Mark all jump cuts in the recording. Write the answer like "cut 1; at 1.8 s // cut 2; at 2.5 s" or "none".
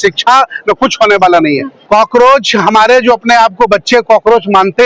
cut 1; at 1.7 s